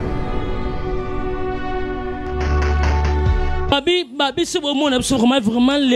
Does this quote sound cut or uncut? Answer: uncut